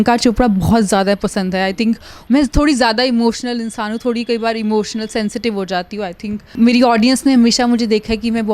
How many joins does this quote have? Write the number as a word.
two